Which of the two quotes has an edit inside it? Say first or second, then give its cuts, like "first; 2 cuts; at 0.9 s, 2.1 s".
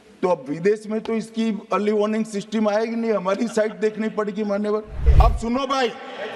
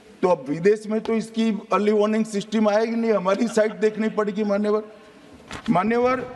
first; 1 cut; at 5.0 s